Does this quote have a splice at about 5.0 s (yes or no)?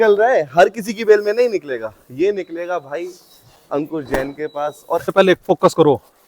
yes